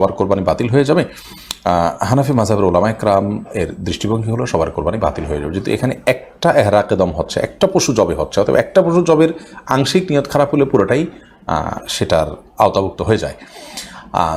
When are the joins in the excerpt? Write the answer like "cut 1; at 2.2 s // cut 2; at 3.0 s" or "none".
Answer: none

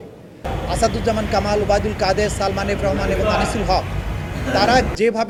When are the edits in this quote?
none

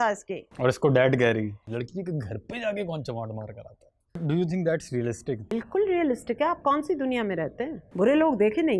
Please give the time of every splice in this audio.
cut 1; at 1.6 s // cut 2; at 4.2 s // cut 3; at 5.5 s // cut 4; at 7.8 s

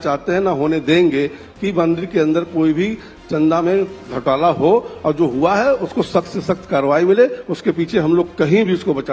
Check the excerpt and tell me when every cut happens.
none

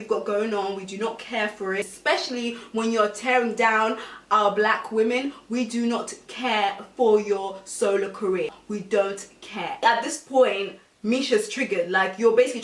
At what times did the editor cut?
cut 1; at 8.6 s // cut 2; at 9.7 s

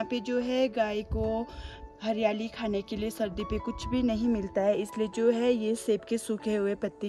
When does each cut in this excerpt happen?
none

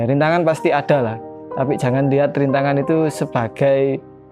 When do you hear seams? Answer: none

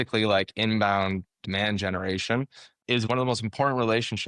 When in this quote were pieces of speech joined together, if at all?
cut 1; at 3.1 s

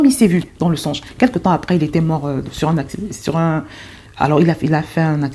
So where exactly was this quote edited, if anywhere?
none

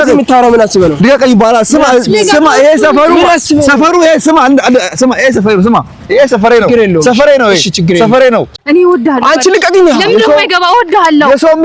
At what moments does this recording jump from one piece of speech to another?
cut 1; at 8.5 s

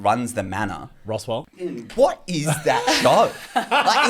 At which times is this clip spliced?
cut 1; at 1.9 s

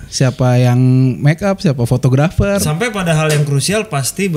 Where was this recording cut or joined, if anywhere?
cut 1; at 2.7 s

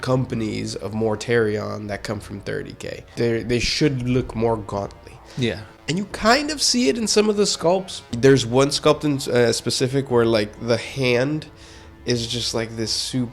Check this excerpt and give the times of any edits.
cut 1; at 3.1 s // cut 2; at 8.0 s

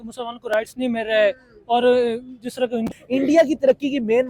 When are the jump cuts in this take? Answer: cut 1; at 2.9 s

